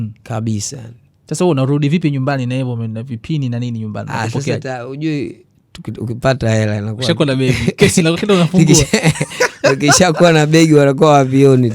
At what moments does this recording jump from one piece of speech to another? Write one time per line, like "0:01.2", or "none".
none